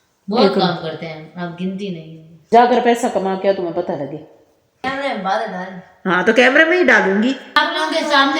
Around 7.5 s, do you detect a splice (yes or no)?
yes